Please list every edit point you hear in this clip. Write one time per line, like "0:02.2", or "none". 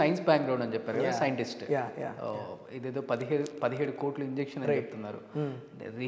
none